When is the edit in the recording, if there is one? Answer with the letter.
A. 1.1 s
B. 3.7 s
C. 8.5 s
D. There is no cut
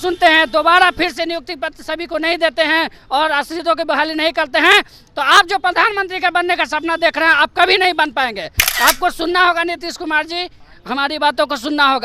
C